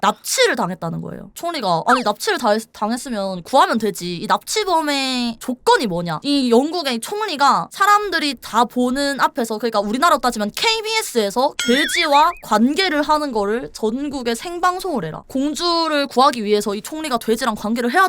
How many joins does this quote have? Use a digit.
3